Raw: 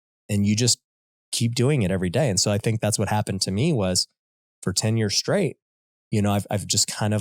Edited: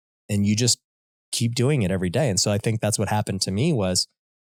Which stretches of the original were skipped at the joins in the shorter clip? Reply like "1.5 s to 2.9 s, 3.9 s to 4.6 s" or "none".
none